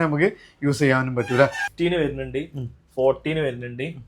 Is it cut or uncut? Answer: cut